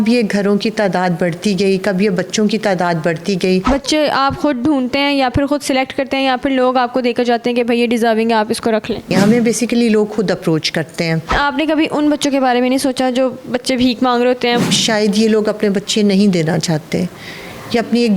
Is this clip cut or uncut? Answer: cut